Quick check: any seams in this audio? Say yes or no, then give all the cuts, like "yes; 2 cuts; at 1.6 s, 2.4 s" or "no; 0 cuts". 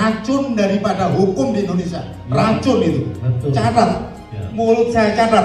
no; 0 cuts